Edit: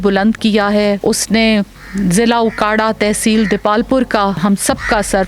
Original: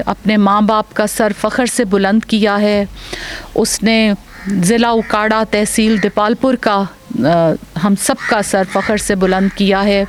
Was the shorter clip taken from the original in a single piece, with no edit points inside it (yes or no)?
no